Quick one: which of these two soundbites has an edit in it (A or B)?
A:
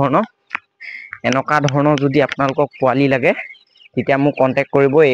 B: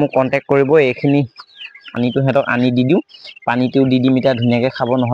B